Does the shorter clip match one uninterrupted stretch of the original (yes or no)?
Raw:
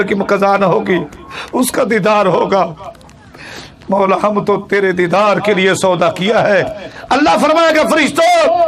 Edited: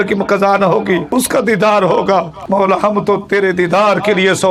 no